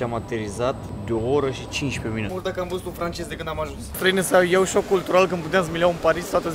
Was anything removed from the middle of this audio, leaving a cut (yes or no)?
yes